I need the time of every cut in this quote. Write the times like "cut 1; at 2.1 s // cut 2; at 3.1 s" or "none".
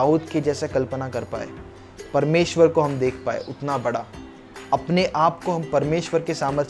none